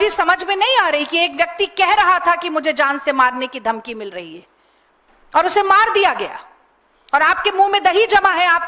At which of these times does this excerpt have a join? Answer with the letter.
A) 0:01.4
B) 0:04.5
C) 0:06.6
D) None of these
D